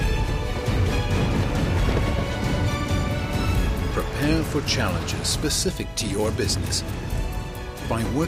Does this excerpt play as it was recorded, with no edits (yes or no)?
yes